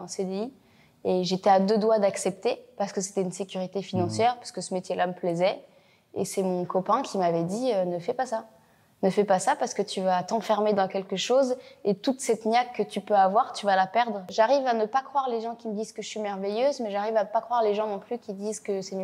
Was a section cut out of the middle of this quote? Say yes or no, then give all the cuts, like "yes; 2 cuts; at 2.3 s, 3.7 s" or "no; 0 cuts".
yes; 1 cut; at 14.3 s